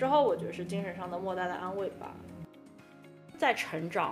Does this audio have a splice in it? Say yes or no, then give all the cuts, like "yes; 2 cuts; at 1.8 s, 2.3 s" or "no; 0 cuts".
yes; 1 cut; at 2.9 s